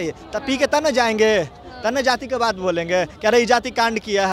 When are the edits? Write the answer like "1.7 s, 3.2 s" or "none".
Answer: none